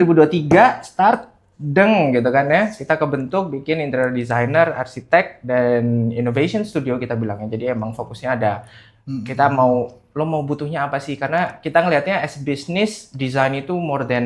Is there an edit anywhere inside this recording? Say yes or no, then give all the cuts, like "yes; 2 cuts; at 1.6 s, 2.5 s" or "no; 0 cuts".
no; 0 cuts